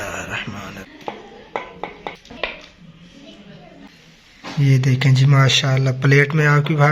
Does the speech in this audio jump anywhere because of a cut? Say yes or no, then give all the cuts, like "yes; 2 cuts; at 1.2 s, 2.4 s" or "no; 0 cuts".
yes; 3 cuts; at 0.9 s, 2.2 s, 3.9 s